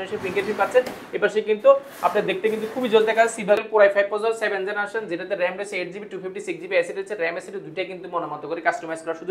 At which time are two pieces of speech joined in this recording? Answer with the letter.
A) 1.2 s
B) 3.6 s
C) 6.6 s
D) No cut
B